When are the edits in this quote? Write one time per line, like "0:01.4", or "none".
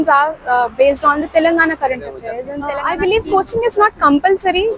0:02.7